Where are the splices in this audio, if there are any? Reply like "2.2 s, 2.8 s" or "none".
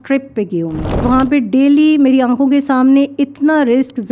1.0 s